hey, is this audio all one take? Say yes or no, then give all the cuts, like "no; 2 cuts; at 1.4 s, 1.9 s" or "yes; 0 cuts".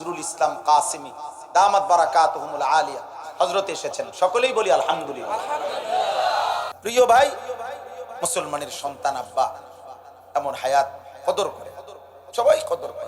no; 1 cut; at 6.7 s